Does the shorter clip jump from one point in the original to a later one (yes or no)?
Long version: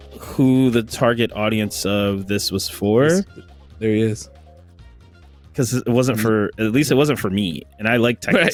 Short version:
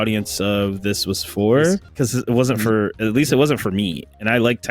yes